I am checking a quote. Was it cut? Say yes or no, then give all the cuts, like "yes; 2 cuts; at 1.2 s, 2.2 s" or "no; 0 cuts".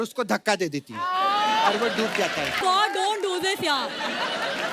yes; 1 cut; at 2.6 s